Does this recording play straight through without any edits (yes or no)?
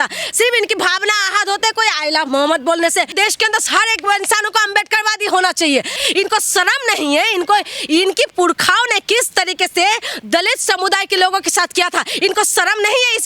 no